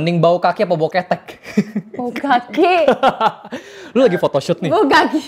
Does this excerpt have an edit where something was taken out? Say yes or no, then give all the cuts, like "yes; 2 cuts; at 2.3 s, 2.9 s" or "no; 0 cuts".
no; 0 cuts